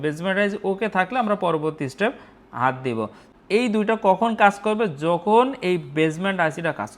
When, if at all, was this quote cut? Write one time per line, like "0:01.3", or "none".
0:03.2